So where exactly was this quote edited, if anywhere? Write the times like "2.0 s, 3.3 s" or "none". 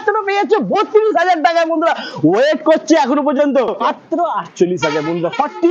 3.8 s

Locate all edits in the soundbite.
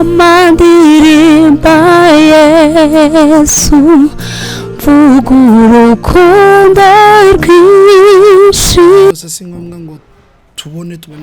9.1 s

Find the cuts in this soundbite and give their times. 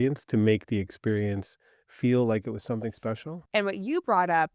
3.3 s

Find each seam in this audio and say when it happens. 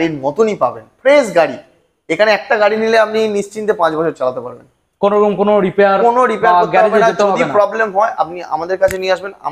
none

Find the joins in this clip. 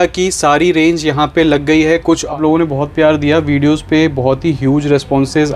2.3 s

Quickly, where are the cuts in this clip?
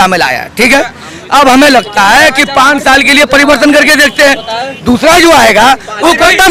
none

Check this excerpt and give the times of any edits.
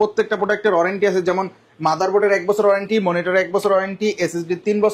none

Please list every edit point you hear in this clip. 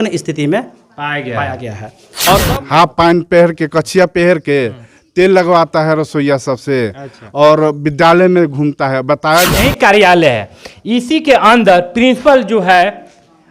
2.5 s, 9.5 s

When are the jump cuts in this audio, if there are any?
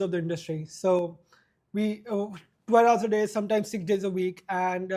none

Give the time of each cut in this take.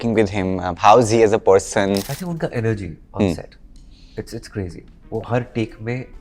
2.2 s

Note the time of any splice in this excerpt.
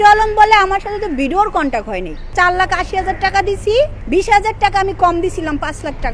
2.3 s, 4.0 s

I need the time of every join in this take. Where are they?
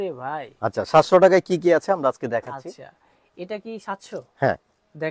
none

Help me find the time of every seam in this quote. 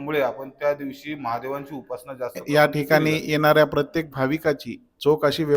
2.4 s

